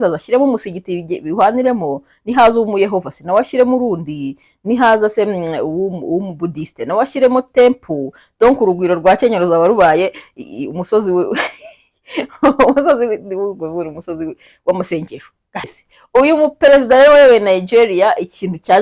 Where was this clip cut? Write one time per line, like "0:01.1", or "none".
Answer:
0:15.6